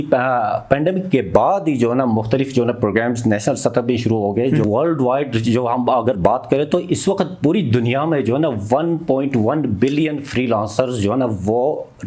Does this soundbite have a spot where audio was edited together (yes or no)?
yes